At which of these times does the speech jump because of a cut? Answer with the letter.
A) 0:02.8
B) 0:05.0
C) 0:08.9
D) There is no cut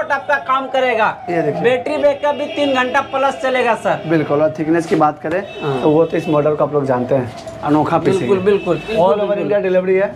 C